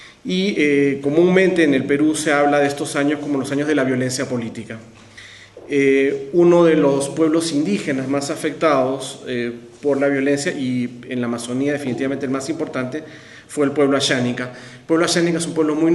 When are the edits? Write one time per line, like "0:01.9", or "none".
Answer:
none